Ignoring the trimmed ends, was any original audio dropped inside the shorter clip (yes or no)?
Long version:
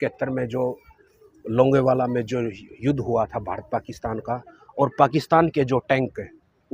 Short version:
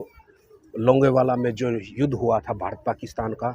yes